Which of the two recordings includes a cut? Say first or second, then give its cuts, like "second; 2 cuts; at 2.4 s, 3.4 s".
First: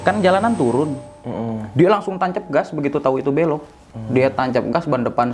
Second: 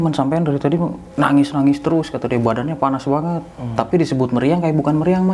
second; 1 cut; at 1.0 s